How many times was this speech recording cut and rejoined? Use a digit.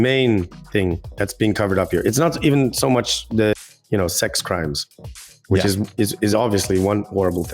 1